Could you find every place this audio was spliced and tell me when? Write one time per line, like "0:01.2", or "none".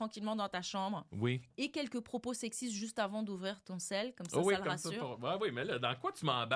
none